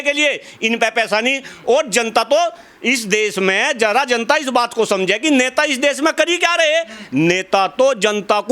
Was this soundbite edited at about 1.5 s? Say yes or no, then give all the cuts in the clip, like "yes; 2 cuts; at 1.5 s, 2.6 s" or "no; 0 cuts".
no; 0 cuts